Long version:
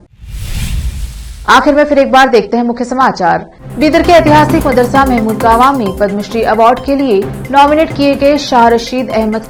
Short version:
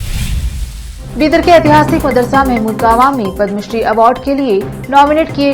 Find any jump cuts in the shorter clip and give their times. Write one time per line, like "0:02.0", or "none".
0:00.9